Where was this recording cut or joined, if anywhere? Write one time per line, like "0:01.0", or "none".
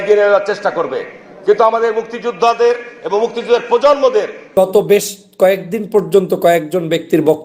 0:04.5